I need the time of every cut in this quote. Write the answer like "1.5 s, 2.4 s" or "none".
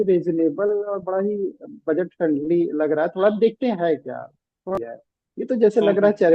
4.8 s

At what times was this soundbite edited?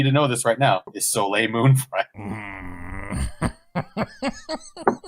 1.0 s, 2.1 s

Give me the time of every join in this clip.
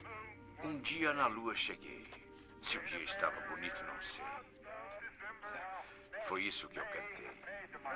4.8 s

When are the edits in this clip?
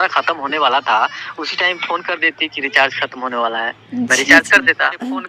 none

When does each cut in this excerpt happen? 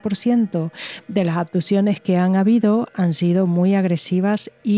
none

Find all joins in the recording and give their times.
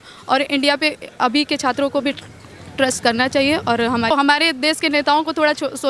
4.1 s

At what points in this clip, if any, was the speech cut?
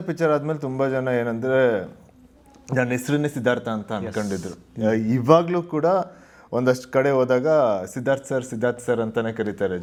none

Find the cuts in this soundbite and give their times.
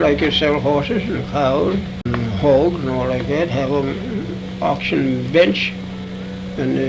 2.0 s

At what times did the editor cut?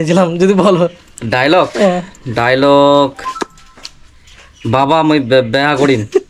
none

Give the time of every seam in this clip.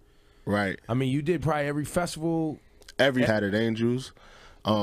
none

